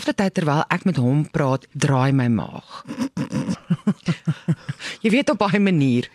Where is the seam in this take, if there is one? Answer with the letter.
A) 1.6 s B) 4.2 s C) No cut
A